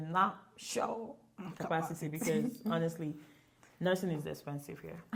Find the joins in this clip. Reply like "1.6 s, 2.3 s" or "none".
none